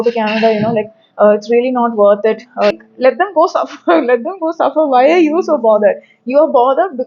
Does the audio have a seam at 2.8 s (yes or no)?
yes